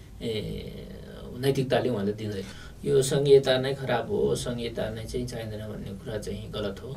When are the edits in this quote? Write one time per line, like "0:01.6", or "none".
0:02.5